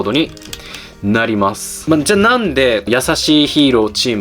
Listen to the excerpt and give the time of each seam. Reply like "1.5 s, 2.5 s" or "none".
1.7 s, 2.9 s